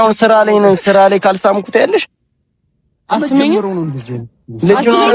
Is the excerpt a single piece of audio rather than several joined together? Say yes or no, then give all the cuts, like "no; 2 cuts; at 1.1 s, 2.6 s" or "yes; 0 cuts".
yes; 0 cuts